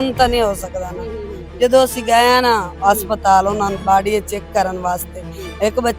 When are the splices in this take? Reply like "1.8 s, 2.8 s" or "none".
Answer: 1.4 s